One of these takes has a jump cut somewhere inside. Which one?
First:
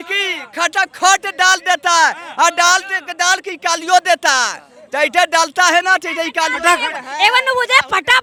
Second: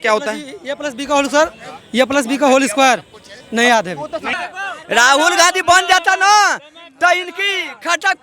second; 1 cut; at 4.3 s

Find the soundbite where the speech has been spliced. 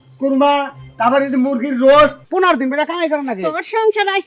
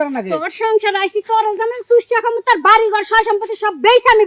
first; 1 cut; at 2.2 s

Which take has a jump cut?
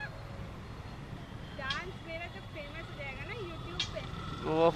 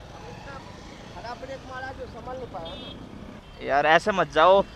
second; 1 cut; at 3.4 s

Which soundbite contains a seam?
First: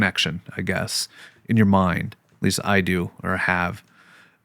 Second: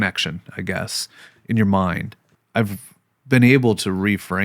second; 1 cut; at 2.3 s

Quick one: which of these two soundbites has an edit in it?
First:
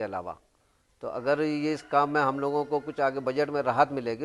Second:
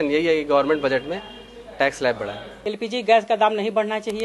second; 1 cut; at 2.5 s

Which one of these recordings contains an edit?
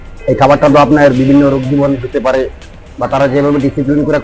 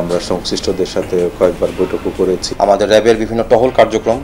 second; 1 cut; at 2.5 s

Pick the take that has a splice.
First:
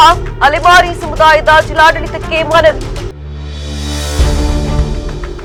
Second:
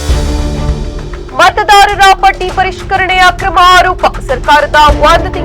second; 1 cut; at 1.2 s

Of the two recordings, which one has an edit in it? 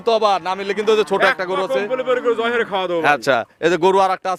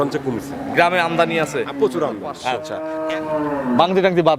second; 1 cut; at 2.6 s

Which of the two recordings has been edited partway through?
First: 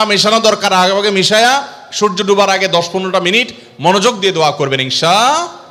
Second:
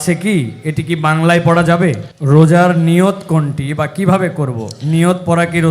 second; 1 cut; at 2.1 s

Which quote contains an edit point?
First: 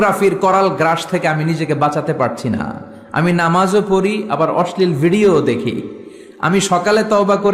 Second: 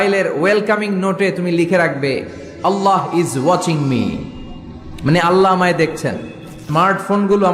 second; 1 cut; at 6.6 s

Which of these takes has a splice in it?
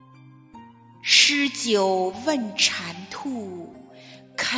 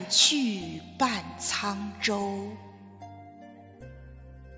second; 1 cut; at 3.2 s

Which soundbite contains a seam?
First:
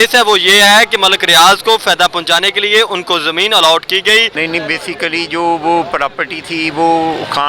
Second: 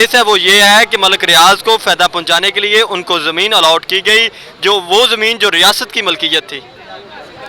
first; 1 cut; at 4.3 s

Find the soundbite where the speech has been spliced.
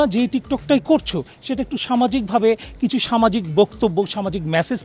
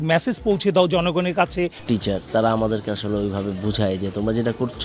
second; 1 cut; at 1.8 s

